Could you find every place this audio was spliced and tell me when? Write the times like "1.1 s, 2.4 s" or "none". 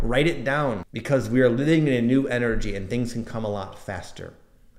0.9 s